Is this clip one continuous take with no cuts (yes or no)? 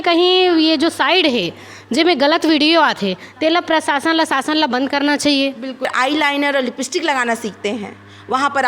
no